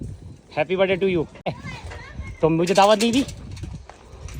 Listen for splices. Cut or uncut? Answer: cut